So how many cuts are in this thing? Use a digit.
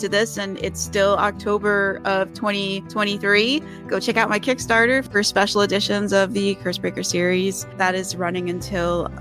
1